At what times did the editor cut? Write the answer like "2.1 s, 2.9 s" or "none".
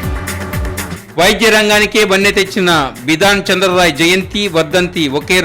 0.9 s